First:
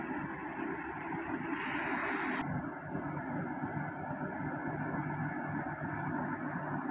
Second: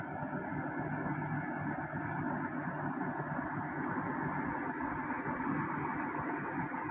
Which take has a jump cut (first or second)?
first